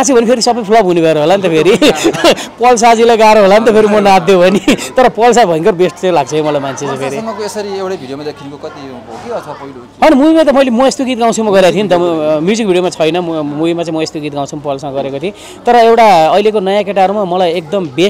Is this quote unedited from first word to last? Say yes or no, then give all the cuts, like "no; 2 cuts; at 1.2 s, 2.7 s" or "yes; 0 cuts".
yes; 0 cuts